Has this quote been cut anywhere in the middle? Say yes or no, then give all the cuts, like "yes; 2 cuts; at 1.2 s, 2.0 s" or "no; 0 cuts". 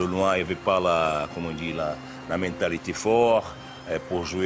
no; 0 cuts